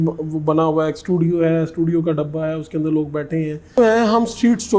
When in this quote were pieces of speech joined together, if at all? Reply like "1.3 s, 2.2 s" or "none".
3.8 s